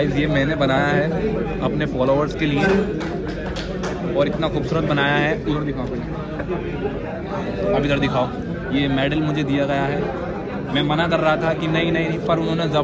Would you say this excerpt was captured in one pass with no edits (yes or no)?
yes